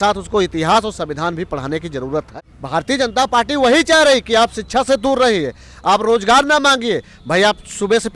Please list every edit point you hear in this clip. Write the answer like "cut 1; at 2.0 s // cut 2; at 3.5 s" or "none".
cut 1; at 2.3 s